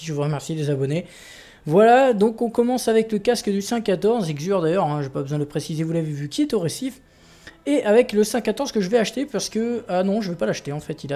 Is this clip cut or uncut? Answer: cut